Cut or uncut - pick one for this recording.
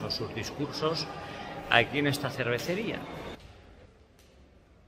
cut